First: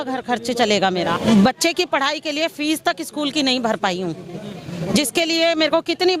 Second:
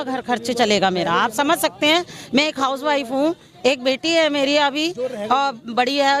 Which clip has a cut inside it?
first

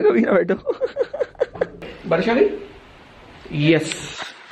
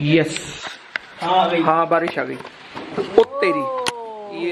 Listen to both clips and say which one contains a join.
first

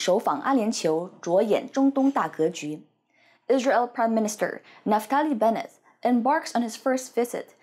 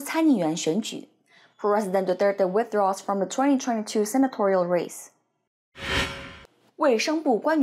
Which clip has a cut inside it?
second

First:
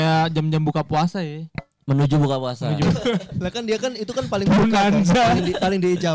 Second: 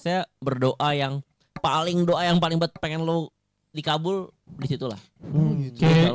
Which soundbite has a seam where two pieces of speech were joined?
first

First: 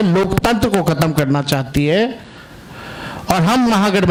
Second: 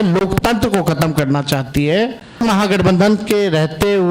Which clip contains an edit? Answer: second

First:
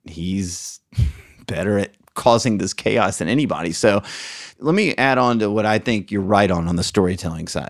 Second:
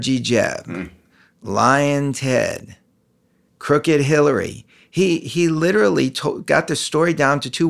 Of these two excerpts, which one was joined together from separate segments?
first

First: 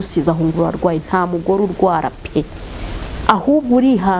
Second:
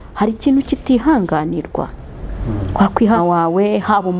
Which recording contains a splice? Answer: second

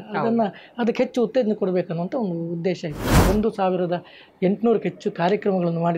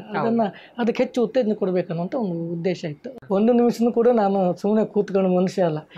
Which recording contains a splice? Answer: first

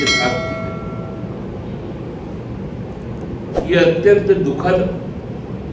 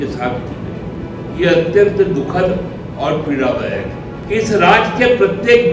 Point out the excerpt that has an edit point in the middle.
second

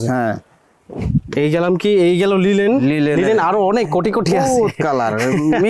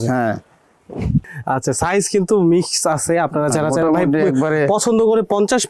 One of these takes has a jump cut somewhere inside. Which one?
second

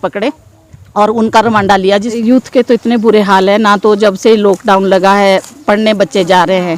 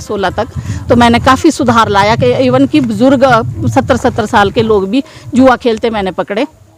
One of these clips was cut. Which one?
first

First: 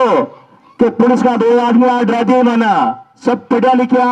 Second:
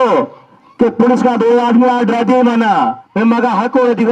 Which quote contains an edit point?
second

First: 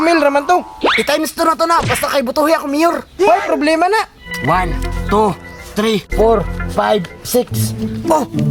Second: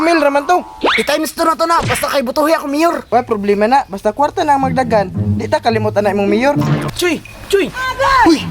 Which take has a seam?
second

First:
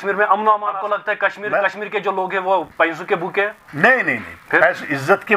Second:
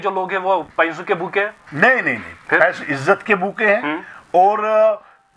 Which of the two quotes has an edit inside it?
first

